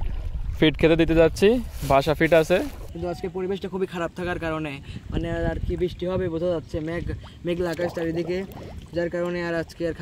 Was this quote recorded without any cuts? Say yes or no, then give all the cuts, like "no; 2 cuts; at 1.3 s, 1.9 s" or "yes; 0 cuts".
no; 1 cut; at 2.8 s